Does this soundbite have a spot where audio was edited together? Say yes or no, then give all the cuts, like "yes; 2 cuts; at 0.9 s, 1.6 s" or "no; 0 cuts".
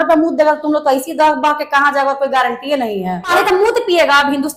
yes; 1 cut; at 3.3 s